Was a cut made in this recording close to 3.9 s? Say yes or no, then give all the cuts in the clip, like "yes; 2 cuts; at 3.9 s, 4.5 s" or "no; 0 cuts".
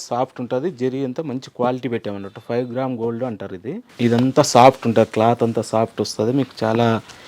yes; 1 cut; at 3.9 s